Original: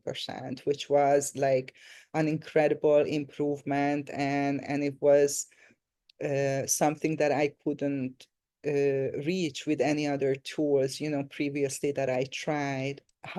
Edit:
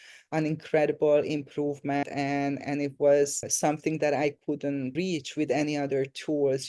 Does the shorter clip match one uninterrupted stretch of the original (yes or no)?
no